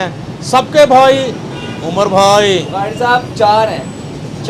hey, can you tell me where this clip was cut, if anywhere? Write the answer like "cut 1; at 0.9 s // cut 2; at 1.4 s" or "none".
none